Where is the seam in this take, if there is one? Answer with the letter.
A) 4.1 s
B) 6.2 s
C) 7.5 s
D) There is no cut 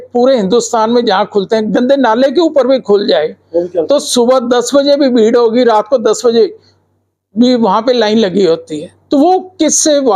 D